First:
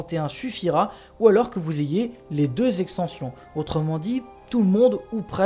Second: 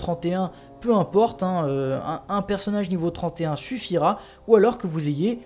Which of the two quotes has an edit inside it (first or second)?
second